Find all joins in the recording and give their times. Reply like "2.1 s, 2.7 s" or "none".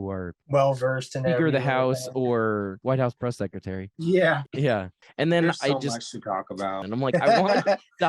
2.8 s, 3.9 s, 4.5 s, 6.8 s